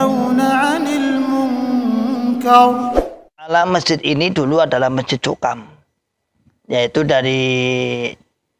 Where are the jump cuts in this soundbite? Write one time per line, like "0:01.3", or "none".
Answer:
0:03.5